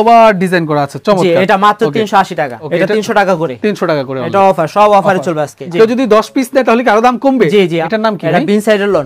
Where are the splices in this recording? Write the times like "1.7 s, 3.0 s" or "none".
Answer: 2.6 s, 5.6 s, 7.8 s